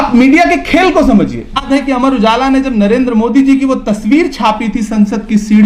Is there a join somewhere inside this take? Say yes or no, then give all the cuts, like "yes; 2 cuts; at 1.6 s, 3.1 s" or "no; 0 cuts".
yes; 1 cut; at 1.6 s